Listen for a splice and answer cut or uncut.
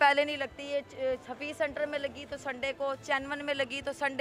uncut